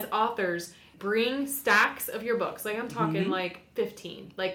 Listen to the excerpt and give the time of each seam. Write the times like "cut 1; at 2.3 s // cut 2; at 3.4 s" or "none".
cut 1; at 0.9 s